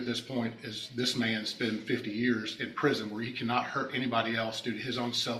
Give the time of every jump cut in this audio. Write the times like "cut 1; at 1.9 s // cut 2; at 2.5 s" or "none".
none